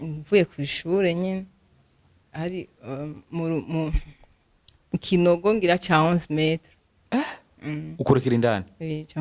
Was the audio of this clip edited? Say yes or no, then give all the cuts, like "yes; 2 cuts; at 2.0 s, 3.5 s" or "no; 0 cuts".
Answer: no; 0 cuts